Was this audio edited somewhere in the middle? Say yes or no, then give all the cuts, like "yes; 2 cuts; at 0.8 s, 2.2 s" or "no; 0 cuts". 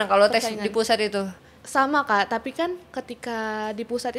yes; 1 cut; at 1.5 s